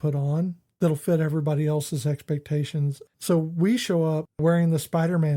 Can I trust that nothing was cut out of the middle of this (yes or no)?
no